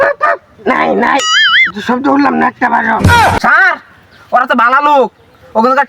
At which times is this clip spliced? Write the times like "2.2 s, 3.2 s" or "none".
3.4 s